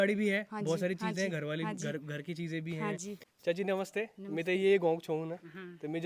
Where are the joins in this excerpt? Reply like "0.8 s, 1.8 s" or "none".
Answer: 3.2 s